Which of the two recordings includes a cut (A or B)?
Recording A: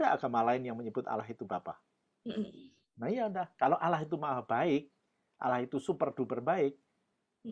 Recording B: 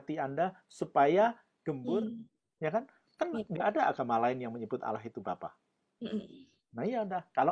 B